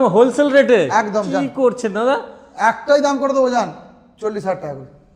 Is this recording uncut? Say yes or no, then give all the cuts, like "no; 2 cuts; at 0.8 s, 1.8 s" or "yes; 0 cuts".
yes; 0 cuts